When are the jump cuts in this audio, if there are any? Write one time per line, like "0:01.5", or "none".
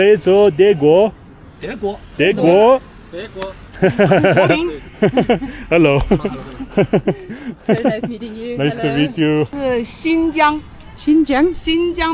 0:09.5